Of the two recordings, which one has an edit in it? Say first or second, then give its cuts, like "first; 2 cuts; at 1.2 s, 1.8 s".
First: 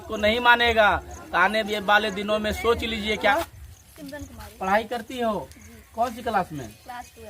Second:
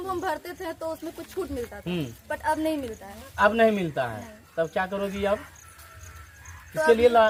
first; 1 cut; at 3.3 s